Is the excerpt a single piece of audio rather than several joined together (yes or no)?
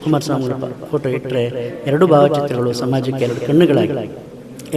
yes